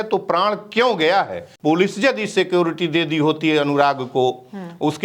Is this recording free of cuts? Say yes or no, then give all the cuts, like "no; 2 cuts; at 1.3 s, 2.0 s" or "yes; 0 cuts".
no; 1 cut; at 1.4 s